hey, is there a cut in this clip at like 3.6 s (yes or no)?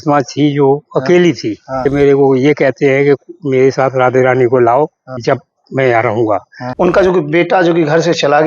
no